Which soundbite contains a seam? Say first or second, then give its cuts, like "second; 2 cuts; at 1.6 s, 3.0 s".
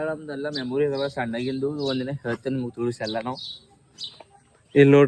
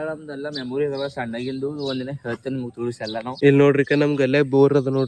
second; 1 cut; at 3.4 s